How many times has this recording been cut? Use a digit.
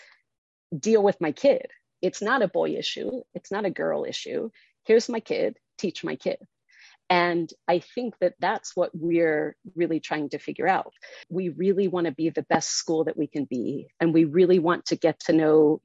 2